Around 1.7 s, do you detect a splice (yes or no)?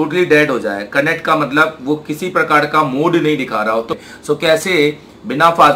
no